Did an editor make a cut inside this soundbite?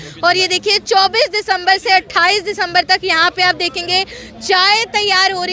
no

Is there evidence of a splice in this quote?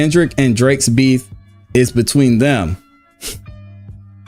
yes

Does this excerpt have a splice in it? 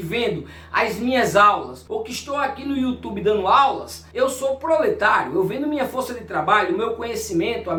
no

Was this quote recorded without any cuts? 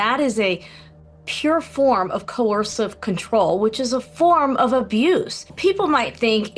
no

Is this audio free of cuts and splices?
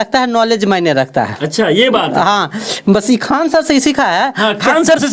yes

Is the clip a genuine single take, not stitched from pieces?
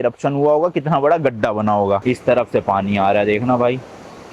no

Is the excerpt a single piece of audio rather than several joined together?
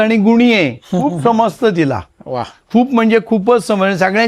yes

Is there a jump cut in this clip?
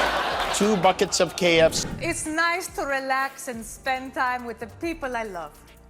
yes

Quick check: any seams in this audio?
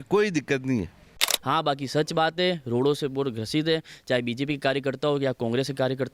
yes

